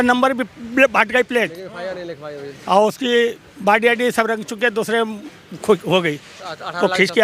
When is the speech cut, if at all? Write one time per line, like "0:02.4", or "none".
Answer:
none